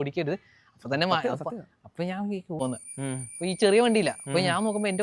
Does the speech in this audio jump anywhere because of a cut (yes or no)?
yes